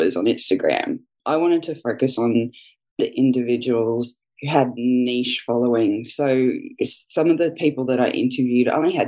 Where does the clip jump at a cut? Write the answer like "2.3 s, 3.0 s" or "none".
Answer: 1.2 s

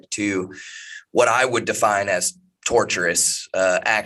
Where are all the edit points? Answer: none

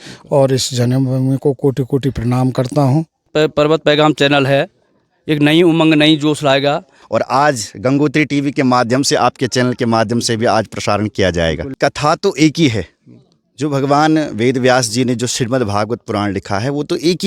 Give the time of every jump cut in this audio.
3.3 s, 7.0 s, 11.7 s

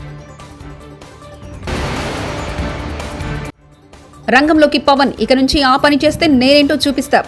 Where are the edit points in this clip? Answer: none

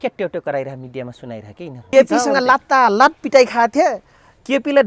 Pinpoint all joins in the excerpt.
1.9 s

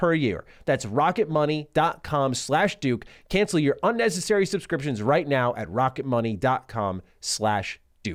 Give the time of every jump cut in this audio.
none

